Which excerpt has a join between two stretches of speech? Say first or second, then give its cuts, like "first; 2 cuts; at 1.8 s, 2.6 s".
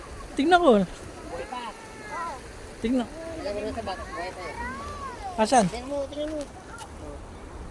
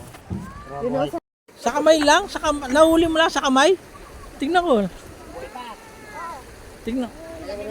second; 1 cut; at 1.2 s